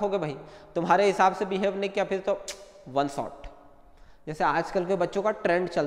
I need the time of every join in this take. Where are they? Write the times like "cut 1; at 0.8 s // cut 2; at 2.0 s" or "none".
none